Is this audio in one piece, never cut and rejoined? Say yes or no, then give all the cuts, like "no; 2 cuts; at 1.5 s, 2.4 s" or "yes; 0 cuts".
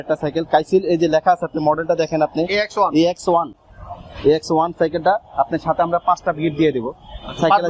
yes; 0 cuts